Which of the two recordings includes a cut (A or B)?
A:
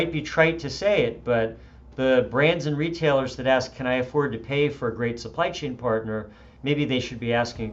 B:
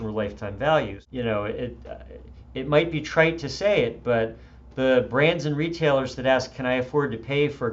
B